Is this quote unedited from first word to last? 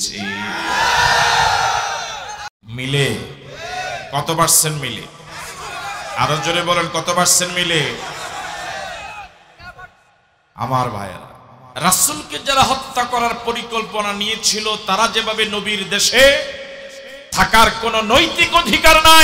no; 1 cut; at 2.4 s

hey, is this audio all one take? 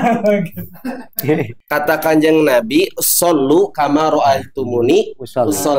no; 1 cut; at 1.6 s

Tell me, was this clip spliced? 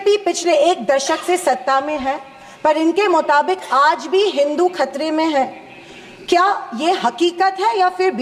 no; 0 cuts

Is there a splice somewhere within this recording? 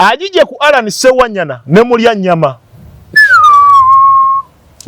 no; 0 cuts

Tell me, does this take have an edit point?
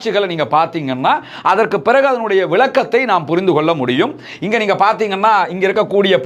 no; 0 cuts

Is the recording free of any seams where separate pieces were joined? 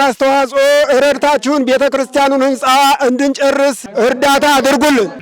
no; 1 cut; at 3.8 s

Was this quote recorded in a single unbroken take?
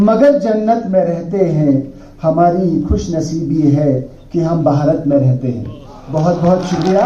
yes; 0 cuts

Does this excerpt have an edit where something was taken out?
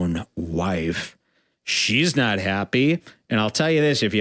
no; 0 cuts

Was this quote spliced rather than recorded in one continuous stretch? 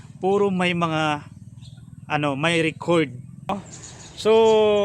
yes; 1 cut; at 3.5 s

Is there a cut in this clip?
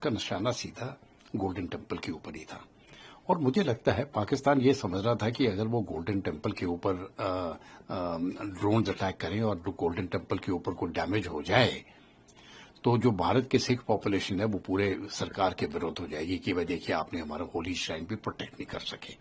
no; 0 cuts

